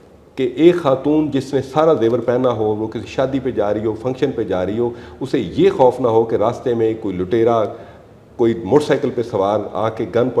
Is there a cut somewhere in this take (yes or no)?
no